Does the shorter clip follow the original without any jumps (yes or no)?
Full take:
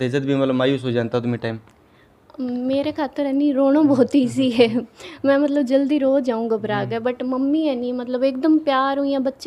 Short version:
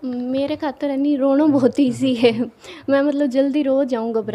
yes